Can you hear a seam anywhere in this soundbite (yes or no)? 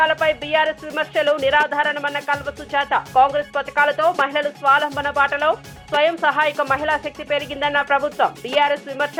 no